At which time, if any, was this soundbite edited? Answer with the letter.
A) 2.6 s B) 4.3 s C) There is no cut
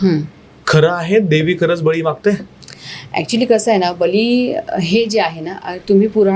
C